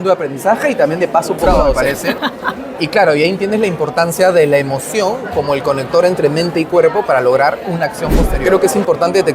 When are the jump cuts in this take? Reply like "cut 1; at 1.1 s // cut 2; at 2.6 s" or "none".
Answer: cut 1; at 1.8 s // cut 2; at 8.3 s